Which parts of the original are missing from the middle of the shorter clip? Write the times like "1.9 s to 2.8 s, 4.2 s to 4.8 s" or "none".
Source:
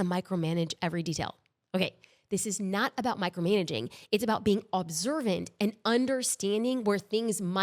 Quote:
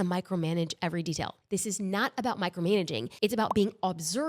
1.4 s to 2.2 s, 3.9 s to 4.0 s